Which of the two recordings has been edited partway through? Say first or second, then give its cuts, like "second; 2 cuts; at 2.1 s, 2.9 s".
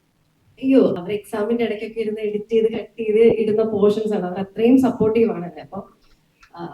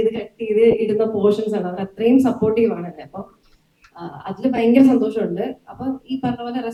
first; 1 cut; at 1.3 s